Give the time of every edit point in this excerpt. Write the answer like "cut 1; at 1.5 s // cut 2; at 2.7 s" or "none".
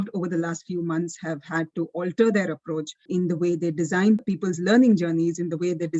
cut 1; at 3.0 s // cut 2; at 4.2 s